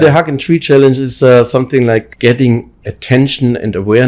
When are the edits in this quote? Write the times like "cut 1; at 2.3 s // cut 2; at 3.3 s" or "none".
cut 1; at 2.1 s